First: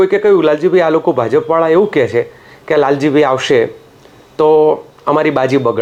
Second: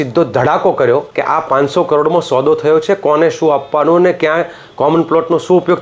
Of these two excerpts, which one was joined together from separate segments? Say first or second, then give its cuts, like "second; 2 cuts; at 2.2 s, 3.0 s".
second; 1 cut; at 1.1 s